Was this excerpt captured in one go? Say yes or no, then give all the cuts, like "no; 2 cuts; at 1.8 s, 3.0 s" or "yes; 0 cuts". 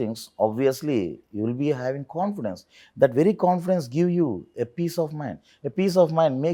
yes; 0 cuts